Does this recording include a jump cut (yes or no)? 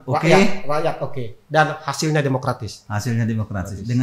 no